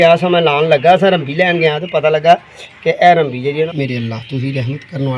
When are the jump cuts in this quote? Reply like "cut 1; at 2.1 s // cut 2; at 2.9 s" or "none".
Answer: cut 1; at 3.7 s